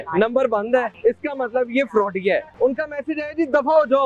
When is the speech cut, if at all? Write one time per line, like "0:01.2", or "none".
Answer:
0:00.9
0:02.5